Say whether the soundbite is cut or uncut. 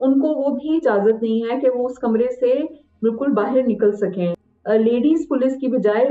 cut